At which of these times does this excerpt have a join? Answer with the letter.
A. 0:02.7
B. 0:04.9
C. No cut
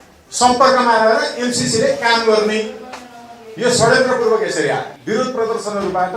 B